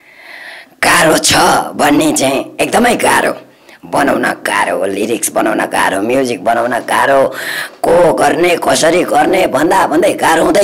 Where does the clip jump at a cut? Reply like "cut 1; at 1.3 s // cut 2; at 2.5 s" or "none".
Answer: none